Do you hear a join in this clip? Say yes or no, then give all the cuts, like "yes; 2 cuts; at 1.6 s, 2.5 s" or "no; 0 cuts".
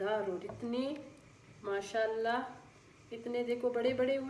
no; 0 cuts